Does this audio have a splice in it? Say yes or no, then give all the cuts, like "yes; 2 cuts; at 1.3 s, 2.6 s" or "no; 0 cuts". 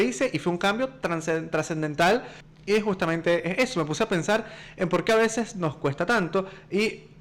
yes; 1 cut; at 2.5 s